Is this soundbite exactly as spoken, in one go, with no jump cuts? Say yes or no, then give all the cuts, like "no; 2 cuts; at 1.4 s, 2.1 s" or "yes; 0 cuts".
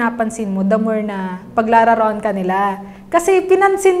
yes; 0 cuts